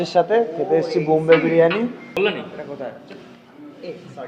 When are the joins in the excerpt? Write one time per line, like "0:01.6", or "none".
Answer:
0:02.2